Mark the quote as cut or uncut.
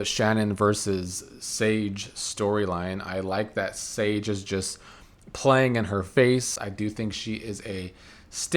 cut